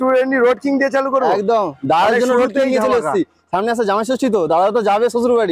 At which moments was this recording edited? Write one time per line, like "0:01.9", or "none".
none